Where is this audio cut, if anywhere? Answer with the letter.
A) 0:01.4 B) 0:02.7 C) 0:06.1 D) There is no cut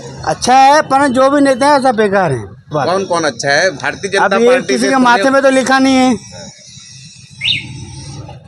B